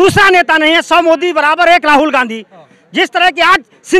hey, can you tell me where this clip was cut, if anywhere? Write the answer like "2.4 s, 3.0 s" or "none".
none